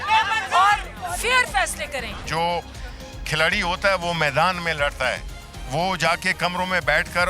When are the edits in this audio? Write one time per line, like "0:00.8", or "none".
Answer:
0:02.2